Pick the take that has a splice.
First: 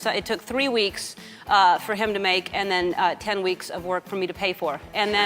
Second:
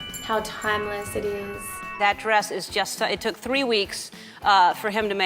second; 1 cut; at 1.8 s

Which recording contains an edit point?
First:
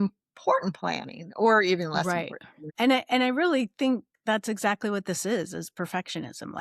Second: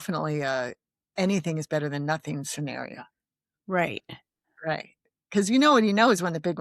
first; 1 cut; at 2.7 s

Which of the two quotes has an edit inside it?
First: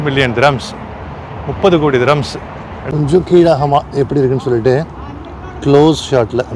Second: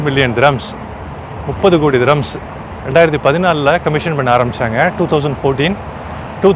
first; 1 cut; at 2.7 s

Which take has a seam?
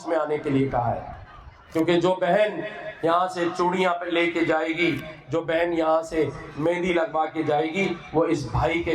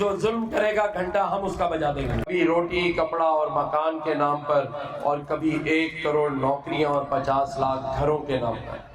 second; 1 cut; at 2.3 s

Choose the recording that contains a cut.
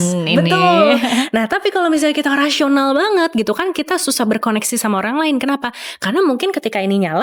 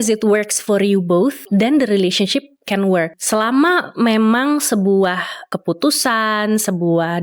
second; 3 cuts; at 1.5 s, 3.2 s, 5.4 s

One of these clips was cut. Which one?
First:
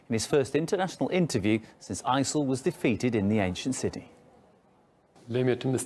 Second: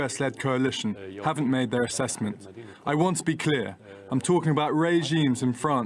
second; 1 cut; at 0.9 s

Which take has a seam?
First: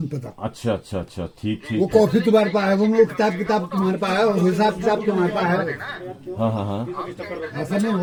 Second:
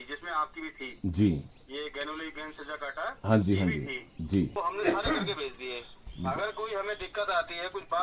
second; 1 cut; at 4.5 s

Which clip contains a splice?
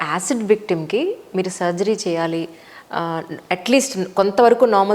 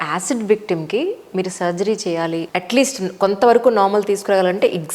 second; 1 cut; at 2.5 s

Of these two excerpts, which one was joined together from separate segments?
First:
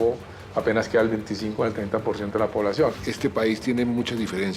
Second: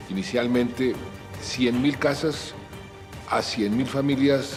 first; 1 cut; at 3.0 s

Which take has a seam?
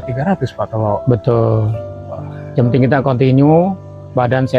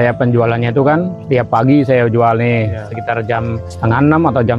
second; 2 cuts; at 1.2 s, 3.7 s

